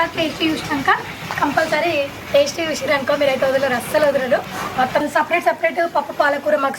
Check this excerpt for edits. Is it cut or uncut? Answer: cut